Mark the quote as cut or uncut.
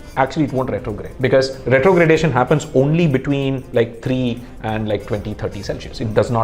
cut